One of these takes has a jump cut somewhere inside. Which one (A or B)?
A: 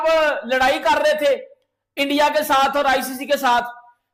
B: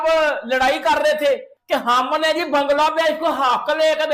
B